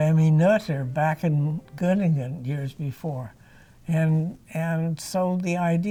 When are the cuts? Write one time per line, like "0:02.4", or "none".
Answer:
none